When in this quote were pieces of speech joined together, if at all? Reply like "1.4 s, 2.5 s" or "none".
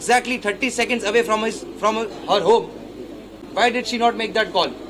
none